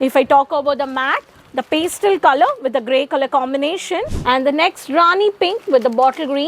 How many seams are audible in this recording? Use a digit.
1